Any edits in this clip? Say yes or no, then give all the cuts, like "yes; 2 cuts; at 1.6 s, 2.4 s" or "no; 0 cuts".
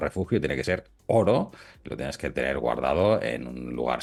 no; 0 cuts